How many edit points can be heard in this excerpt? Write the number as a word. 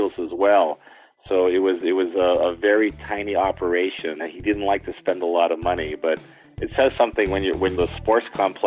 two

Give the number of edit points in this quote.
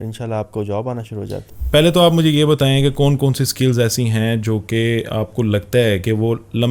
one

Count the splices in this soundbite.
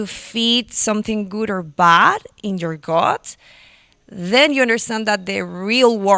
zero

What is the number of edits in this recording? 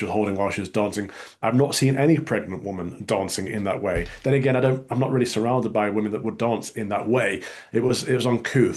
zero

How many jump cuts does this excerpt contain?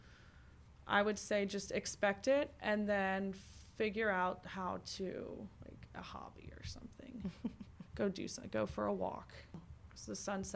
one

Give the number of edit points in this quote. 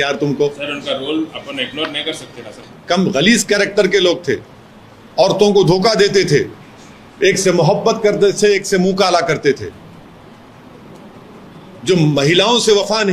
one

